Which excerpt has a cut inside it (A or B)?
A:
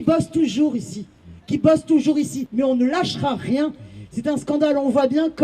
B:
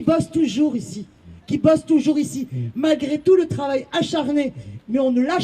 A